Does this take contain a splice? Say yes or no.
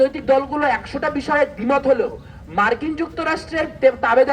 no